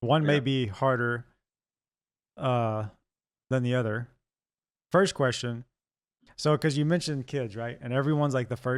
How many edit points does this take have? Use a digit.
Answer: 0